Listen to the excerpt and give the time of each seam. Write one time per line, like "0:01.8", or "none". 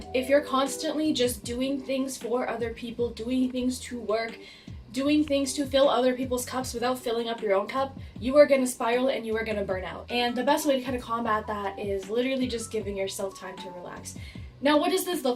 none